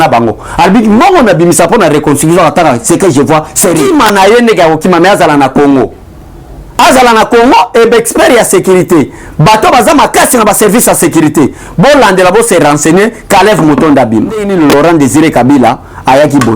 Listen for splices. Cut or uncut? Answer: cut